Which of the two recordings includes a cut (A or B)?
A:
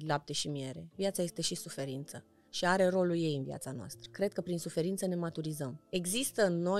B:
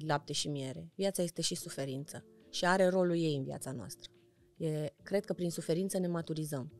A